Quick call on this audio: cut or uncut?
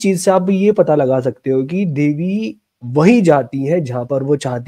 uncut